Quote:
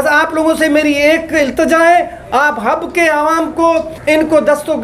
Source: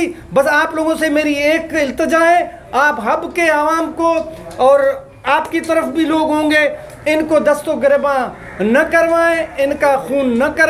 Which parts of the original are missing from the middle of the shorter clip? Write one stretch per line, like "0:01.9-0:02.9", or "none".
0:04.3-0:06.9